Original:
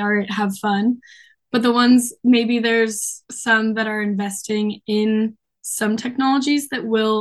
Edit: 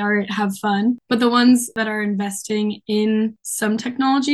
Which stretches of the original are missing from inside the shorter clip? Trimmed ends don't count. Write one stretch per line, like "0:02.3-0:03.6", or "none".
0:01.0-0:01.4
0:02.2-0:03.8
0:05.5-0:05.7